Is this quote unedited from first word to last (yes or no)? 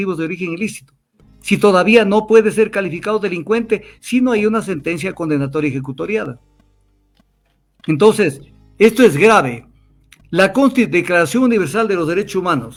yes